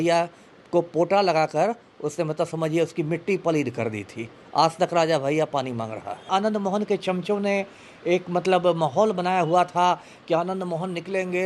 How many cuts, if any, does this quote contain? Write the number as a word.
one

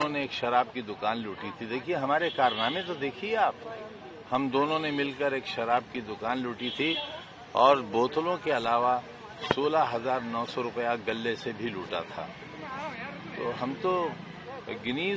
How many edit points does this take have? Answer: zero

